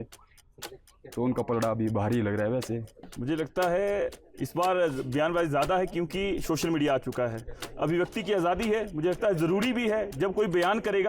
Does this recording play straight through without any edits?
no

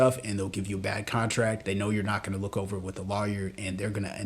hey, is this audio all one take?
no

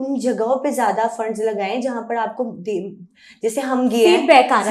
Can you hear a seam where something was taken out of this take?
no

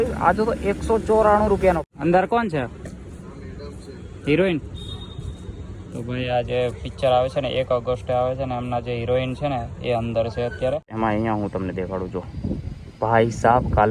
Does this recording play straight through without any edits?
no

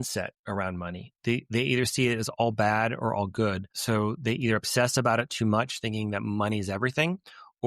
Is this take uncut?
no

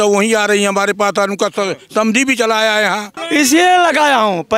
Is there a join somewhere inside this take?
yes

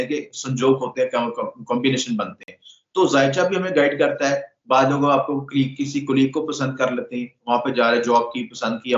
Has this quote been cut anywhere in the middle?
no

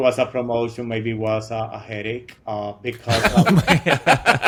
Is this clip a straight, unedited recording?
yes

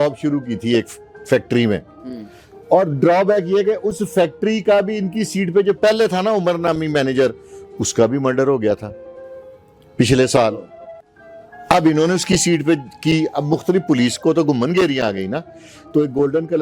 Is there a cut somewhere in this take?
no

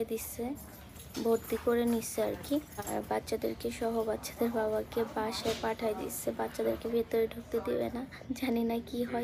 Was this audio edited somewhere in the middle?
yes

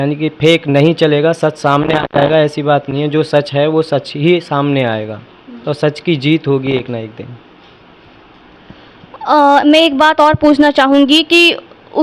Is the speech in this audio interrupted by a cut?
no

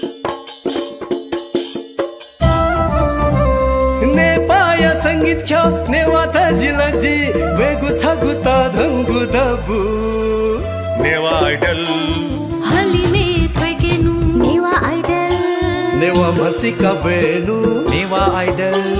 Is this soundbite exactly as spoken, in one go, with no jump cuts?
yes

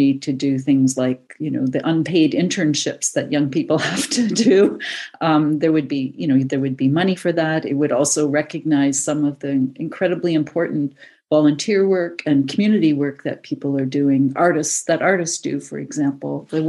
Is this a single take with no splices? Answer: yes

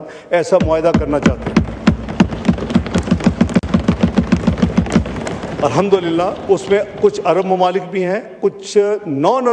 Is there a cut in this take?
no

